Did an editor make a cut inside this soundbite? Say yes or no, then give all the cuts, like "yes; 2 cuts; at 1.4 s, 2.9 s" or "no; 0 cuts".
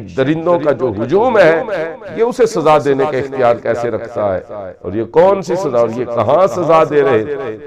no; 0 cuts